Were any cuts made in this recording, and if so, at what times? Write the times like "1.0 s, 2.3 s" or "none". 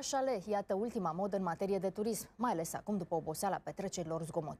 2.2 s